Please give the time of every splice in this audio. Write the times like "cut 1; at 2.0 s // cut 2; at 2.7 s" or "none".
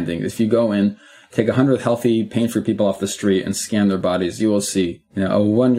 none